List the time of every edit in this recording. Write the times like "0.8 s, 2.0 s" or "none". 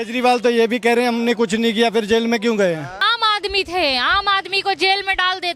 3.1 s